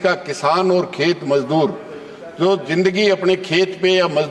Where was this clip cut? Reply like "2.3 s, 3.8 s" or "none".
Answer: none